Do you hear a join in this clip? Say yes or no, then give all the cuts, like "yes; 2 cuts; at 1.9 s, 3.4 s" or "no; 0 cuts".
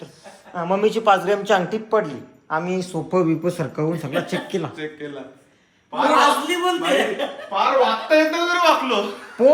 no; 0 cuts